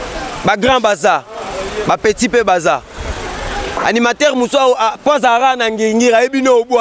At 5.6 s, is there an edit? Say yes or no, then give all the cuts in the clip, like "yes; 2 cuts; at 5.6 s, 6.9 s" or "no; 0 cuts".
no; 0 cuts